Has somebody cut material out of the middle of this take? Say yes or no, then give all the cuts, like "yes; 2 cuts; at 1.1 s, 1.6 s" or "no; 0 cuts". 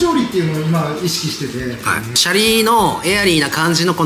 yes; 1 cut; at 2.2 s